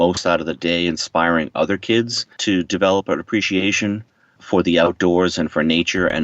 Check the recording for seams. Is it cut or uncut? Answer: cut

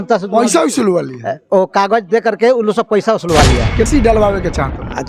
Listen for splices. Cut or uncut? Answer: cut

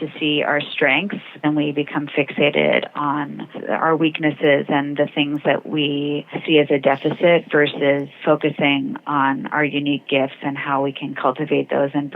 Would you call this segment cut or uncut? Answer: cut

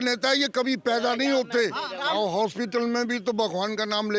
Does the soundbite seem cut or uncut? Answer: cut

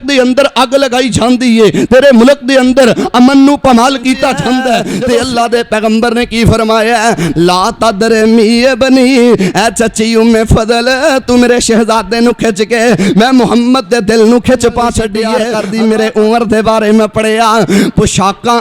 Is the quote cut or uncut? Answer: cut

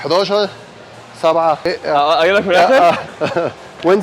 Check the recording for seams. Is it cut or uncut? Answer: cut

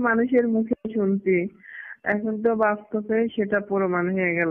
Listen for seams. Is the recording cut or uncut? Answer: uncut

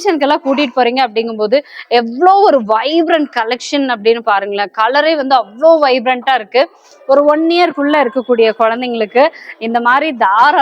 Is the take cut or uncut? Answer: cut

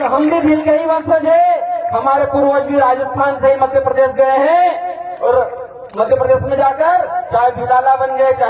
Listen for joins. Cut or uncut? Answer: uncut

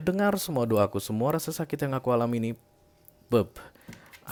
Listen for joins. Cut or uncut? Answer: uncut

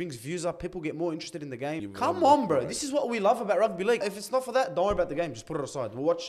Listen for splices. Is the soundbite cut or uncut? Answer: cut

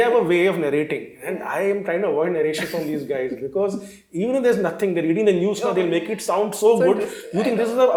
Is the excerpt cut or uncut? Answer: uncut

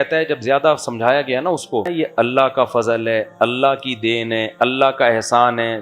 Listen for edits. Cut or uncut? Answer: cut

